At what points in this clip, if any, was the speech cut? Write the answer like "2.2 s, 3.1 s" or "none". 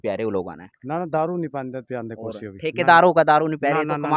none